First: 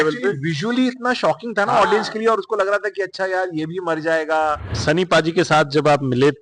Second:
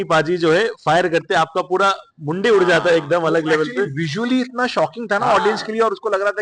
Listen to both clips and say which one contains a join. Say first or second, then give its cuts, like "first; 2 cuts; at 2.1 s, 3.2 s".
first; 1 cut; at 4.7 s